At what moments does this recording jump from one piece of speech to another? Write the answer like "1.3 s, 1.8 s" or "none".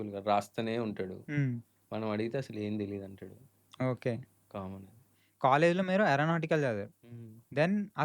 5.2 s